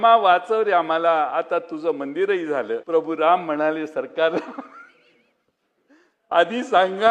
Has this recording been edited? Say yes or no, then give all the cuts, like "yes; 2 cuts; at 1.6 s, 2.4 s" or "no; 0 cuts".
yes; 1 cut; at 2.8 s